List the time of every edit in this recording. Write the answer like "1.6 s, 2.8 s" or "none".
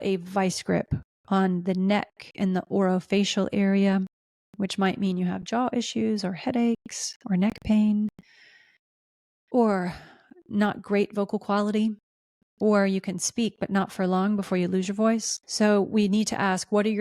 15.4 s